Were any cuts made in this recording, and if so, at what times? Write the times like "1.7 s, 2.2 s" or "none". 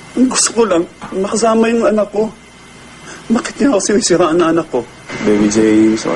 none